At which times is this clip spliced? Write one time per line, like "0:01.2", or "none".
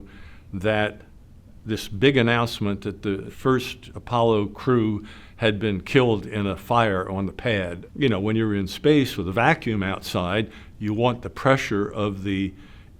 0:03.3
0:07.8